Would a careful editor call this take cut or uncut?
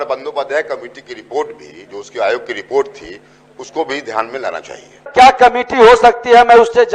cut